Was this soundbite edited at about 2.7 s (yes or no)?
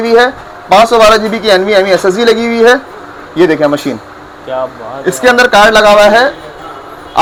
no